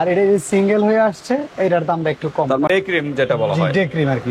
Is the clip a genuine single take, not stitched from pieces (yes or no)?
no